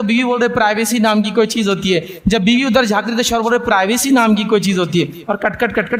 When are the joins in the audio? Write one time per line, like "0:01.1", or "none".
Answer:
none